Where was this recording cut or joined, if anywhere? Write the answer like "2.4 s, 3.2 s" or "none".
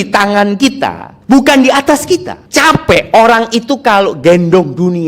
1.1 s, 2.4 s